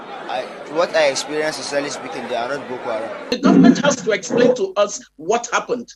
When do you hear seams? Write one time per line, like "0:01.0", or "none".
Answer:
0:03.3

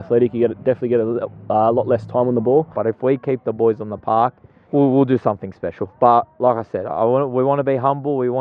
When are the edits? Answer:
0:02.7
0:04.5

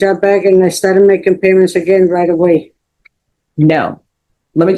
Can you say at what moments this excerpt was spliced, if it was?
none

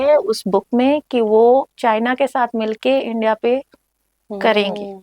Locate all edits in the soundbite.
none

